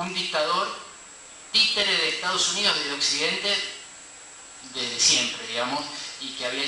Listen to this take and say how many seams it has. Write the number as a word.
one